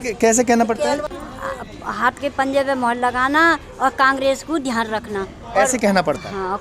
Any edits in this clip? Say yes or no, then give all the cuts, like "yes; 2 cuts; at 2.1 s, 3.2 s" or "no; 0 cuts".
yes; 1 cut; at 1.1 s